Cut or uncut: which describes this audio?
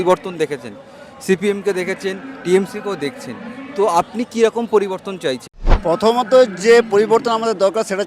cut